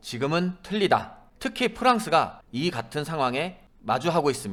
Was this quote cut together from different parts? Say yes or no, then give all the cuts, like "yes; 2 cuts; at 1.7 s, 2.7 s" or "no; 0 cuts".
no; 0 cuts